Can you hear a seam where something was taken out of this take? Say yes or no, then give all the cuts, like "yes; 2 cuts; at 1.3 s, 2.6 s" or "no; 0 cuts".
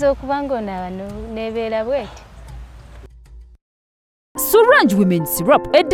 yes; 1 cut; at 3.7 s